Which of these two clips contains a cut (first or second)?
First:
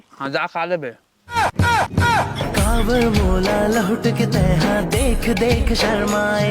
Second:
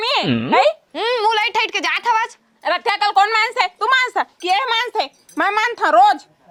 first